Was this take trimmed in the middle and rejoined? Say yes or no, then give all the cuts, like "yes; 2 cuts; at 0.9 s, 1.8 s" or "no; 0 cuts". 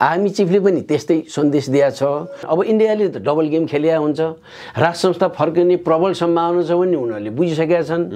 yes; 1 cut; at 2.4 s